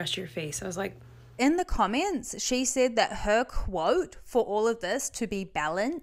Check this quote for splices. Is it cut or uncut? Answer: cut